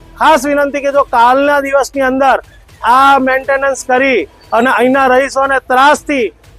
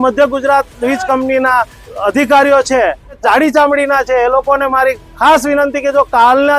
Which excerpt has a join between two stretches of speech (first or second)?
second